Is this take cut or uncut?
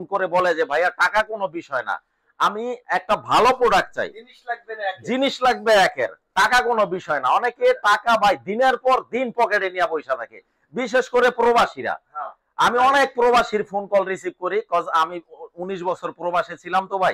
uncut